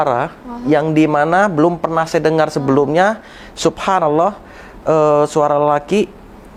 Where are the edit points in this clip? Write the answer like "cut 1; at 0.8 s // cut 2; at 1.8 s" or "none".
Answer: none